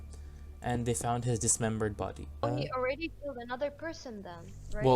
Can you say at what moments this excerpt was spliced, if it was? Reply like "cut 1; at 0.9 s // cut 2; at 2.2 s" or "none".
cut 1; at 2.4 s